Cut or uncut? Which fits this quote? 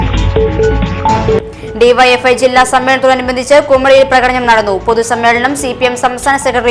cut